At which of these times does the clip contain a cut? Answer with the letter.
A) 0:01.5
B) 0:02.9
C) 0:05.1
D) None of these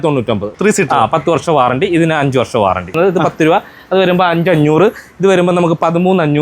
B